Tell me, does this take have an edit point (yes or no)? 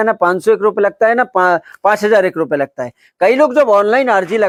no